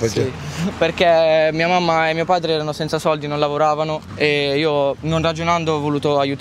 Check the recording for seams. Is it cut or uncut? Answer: uncut